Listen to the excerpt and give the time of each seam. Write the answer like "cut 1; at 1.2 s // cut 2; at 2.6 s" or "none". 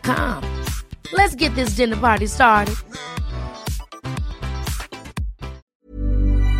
cut 1; at 5.7 s